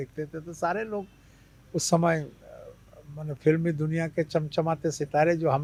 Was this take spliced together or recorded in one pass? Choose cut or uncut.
uncut